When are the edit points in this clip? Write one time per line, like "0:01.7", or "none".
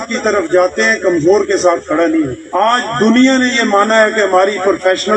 none